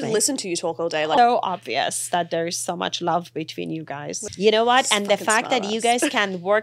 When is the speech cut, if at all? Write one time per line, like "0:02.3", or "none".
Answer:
0:01.2
0:04.1